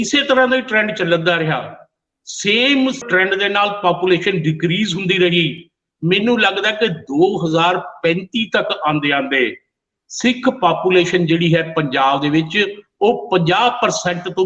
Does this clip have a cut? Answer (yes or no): yes